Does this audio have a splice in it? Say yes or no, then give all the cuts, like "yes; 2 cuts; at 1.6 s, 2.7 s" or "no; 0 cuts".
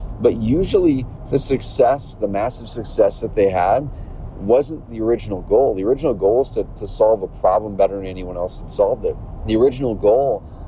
yes; 2 cuts; at 4.9 s, 9.3 s